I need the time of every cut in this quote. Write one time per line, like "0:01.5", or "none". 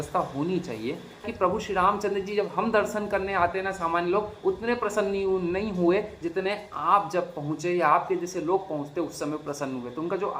0:01.3